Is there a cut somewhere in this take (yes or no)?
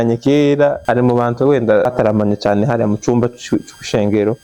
yes